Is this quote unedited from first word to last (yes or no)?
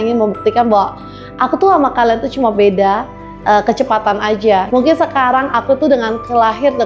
no